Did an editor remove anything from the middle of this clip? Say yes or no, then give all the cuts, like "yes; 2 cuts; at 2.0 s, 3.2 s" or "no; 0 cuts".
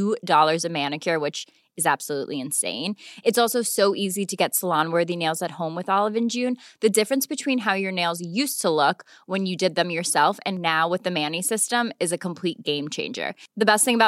no; 0 cuts